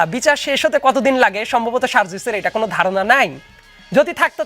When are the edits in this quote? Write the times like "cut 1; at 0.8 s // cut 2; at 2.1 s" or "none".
none